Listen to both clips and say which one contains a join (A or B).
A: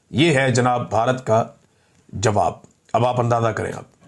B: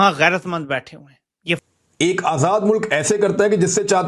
B